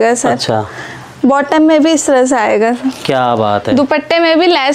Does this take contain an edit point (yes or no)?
no